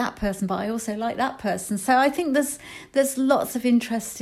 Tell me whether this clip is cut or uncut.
uncut